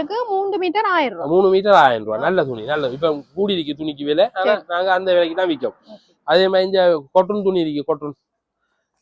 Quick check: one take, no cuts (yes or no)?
yes